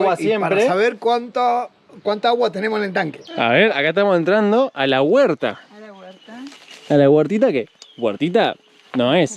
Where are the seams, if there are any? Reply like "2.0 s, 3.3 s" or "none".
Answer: 3.2 s